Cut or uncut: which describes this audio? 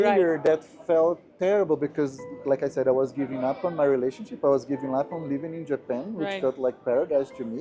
uncut